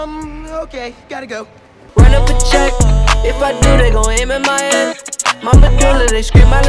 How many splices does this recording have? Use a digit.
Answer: 1